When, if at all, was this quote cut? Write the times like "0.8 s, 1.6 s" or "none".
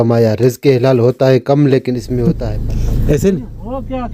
2.2 s